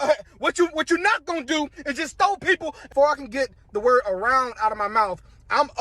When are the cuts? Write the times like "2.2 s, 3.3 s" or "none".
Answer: 2.8 s